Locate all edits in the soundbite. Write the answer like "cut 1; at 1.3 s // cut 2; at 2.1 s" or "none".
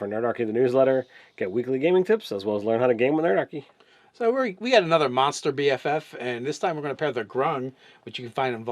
cut 1; at 4.9 s